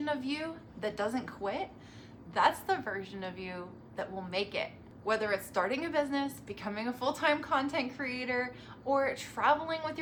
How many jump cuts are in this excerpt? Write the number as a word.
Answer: zero